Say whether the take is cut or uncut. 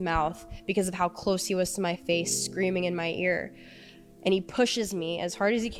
uncut